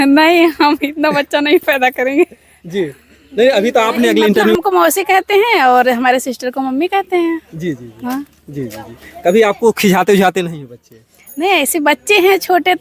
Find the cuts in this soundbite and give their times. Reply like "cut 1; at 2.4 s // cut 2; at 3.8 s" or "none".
cut 1; at 4.5 s